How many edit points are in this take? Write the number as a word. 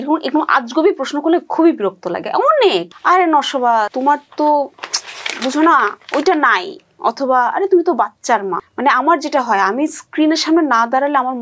three